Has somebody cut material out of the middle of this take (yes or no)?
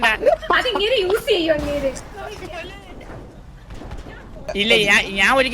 yes